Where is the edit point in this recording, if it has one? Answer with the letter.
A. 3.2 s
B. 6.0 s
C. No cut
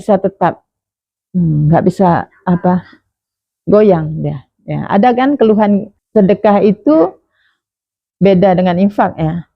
B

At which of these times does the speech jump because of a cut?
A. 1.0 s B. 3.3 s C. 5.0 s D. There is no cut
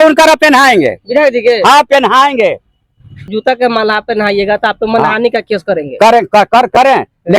B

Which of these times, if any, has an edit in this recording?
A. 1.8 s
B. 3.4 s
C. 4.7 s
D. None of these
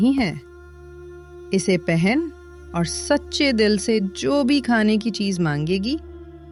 D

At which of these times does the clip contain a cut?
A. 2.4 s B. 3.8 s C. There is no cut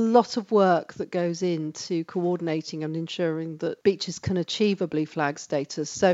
B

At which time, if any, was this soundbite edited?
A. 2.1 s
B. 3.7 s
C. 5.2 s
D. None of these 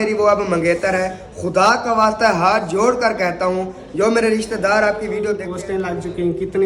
C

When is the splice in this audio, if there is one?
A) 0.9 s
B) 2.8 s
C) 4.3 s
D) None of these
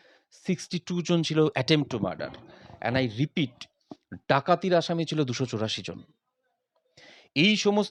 D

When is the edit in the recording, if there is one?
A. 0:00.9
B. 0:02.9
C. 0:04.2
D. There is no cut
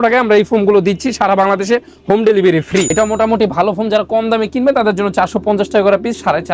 B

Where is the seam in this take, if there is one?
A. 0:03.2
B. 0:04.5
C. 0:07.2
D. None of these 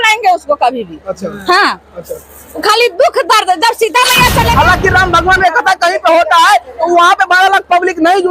B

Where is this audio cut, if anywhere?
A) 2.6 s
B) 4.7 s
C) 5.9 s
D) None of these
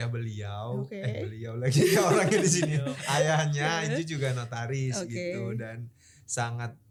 D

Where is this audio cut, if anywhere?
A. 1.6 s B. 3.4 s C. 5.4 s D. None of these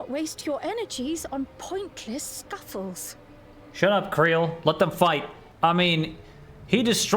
C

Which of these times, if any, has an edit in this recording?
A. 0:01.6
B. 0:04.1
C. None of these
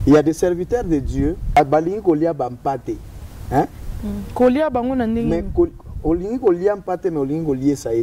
A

